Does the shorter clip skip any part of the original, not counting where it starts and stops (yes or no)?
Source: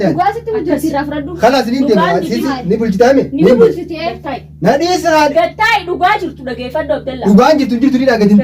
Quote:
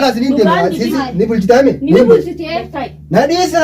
no